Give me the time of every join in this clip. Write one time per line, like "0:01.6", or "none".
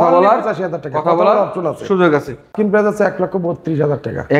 0:02.5